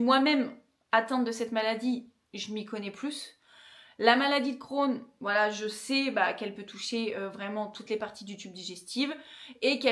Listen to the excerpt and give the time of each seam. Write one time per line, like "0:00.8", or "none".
none